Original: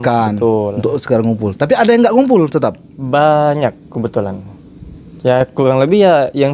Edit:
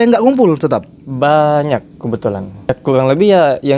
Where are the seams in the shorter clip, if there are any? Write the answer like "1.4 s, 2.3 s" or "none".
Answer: 2.7 s